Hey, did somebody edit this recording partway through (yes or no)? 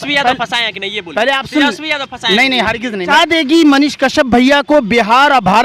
yes